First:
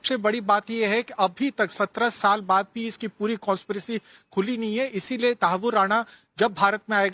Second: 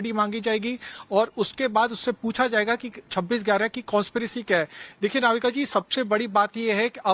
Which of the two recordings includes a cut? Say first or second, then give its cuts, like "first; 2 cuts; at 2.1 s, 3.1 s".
second; 1 cut; at 3.4 s